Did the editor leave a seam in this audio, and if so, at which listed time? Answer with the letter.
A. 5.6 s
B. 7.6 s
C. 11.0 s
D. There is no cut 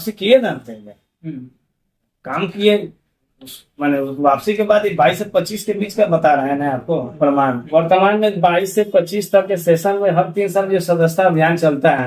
B